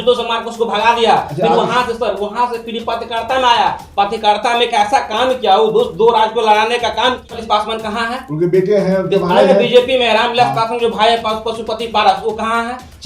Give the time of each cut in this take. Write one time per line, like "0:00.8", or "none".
0:07.3